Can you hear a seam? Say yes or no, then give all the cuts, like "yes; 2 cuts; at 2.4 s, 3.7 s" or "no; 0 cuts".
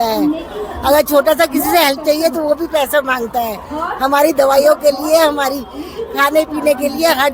no; 0 cuts